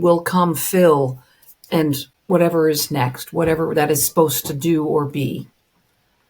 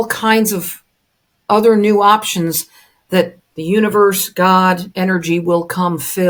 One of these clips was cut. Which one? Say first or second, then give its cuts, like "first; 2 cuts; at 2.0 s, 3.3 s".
first; 1 cut; at 2.1 s